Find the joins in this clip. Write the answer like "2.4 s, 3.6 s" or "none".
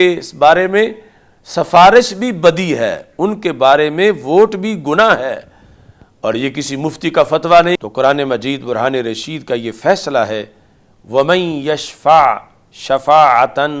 7.8 s